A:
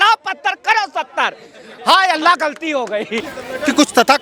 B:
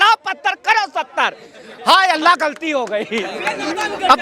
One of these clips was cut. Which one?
A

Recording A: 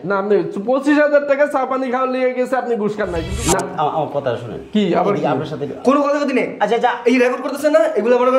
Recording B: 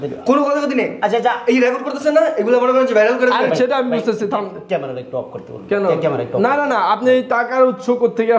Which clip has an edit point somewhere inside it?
A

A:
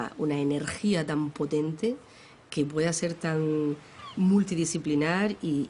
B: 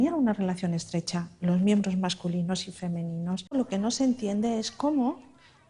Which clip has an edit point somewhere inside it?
B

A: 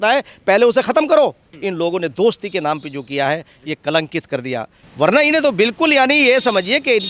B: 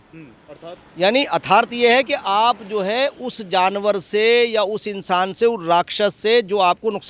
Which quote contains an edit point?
A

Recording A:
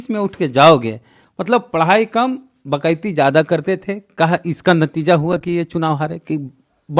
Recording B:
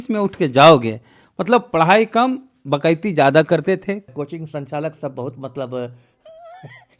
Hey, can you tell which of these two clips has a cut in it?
B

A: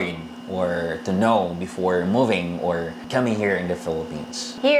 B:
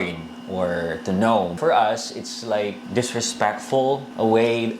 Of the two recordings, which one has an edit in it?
B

